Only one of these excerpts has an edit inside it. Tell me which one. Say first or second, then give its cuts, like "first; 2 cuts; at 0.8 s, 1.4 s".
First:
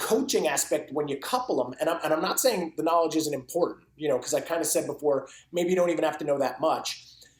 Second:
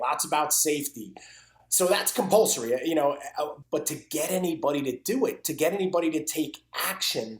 second; 1 cut; at 3.5 s